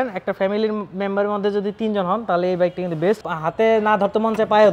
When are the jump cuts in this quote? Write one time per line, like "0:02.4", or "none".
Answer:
0:03.3